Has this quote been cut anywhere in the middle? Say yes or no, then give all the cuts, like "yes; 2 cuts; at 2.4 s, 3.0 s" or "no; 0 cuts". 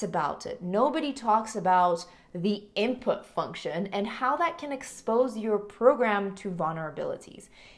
no; 0 cuts